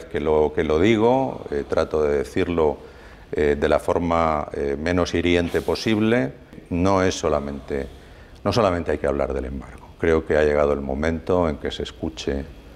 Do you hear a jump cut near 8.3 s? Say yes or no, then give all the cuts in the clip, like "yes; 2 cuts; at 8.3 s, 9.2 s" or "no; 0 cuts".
no; 1 cut; at 6.6 s